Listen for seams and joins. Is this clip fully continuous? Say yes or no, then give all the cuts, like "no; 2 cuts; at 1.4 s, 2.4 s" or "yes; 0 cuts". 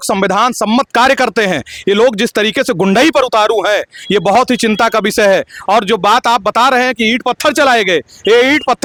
yes; 0 cuts